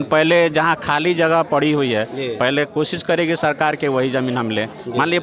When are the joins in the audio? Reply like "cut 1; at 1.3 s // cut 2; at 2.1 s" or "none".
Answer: none